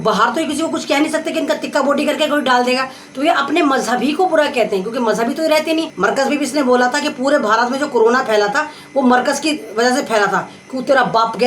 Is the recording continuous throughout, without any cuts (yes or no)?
no